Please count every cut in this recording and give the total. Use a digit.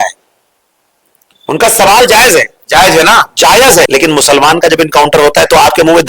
1